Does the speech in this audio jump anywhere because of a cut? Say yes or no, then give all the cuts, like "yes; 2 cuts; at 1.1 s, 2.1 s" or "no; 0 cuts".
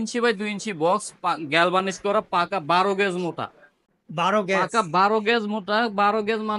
no; 0 cuts